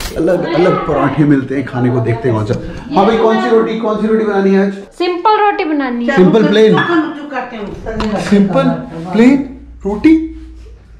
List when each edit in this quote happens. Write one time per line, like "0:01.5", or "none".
0:04.9

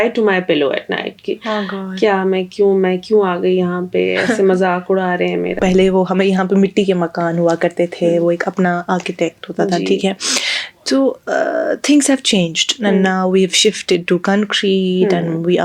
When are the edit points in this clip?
0:05.6

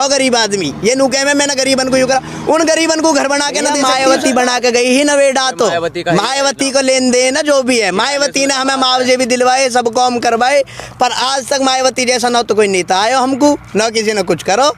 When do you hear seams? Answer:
0:03.8

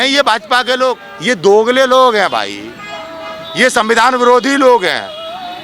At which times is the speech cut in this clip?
0:01.1

